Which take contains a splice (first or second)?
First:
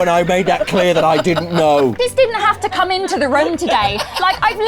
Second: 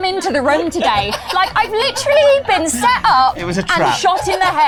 first